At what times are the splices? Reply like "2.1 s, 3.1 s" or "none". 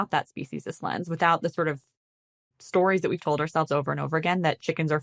none